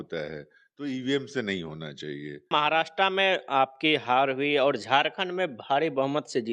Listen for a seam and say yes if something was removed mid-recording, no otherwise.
yes